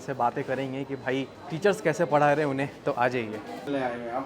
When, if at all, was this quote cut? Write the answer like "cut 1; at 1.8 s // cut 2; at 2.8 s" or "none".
cut 1; at 1.4 s